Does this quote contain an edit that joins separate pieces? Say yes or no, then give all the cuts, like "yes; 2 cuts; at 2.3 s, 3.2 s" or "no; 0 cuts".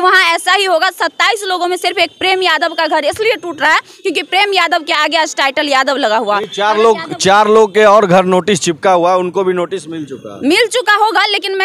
no; 0 cuts